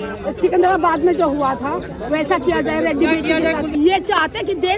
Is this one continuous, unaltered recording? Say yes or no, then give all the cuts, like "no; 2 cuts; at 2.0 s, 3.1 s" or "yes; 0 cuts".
no; 1 cut; at 3.7 s